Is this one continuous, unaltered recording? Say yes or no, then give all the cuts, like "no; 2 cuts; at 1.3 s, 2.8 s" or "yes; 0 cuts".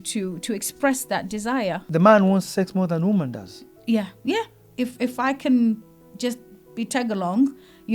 no; 2 cuts; at 1.8 s, 4.6 s